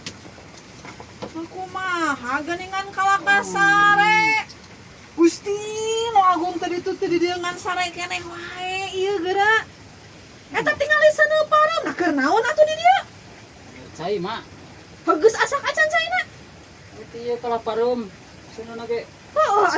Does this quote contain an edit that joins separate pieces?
no; 0 cuts

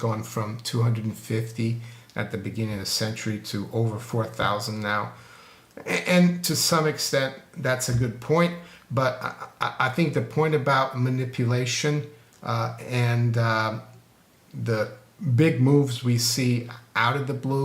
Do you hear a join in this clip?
no; 0 cuts

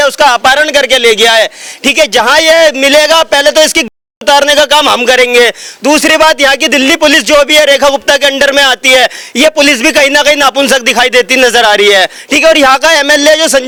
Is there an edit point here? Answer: no; 0 cuts

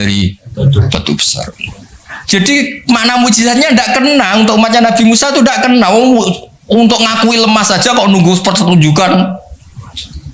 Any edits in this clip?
yes; 1 cut; at 1.6 s

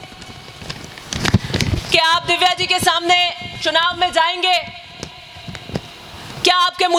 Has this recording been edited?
no; 0 cuts

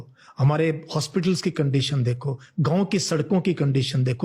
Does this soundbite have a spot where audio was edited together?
no; 0 cuts

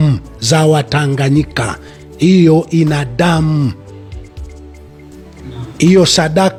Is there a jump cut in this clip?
no; 0 cuts

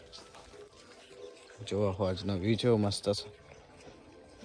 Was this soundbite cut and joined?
no; 0 cuts

